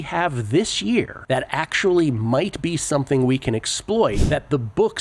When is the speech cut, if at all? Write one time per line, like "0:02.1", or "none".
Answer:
0:01.2
0:04.2